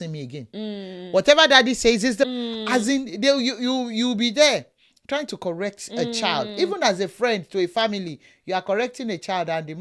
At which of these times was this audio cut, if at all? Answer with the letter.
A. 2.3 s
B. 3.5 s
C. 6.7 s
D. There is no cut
A